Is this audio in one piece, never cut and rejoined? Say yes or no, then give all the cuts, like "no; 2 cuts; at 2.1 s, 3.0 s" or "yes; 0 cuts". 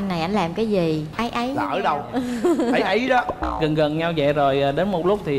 no; 1 cut; at 1.1 s